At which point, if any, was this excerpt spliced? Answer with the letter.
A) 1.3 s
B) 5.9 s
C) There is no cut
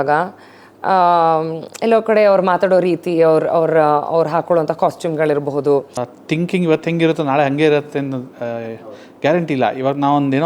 B